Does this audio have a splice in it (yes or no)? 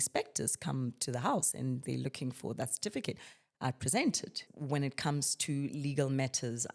yes